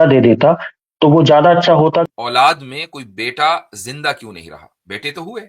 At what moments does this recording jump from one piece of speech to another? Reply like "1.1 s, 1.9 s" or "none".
2.0 s